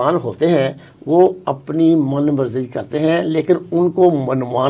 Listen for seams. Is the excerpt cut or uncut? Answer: uncut